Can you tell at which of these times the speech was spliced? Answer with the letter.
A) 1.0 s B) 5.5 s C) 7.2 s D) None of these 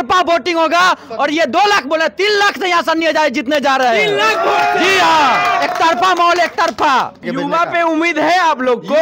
C